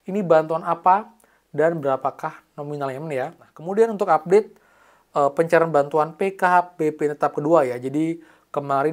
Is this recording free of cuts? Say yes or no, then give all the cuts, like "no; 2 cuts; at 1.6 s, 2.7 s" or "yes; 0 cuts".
no; 1 cut; at 3.5 s